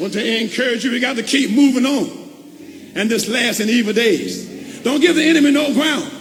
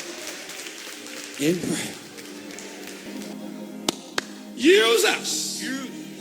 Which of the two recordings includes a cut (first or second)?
second